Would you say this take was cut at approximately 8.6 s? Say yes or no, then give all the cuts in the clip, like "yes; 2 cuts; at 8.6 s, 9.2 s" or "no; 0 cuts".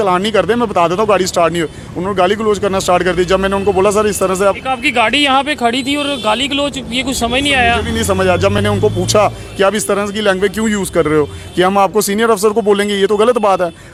no; 0 cuts